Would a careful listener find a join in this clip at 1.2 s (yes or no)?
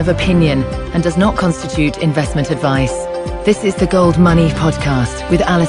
no